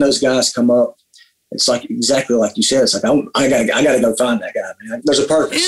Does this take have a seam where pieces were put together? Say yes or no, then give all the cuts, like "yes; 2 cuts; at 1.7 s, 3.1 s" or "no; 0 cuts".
no; 0 cuts